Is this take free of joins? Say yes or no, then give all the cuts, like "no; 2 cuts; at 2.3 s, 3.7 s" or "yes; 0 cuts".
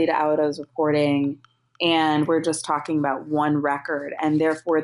yes; 0 cuts